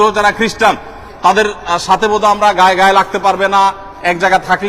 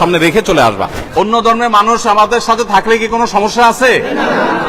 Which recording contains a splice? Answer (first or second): second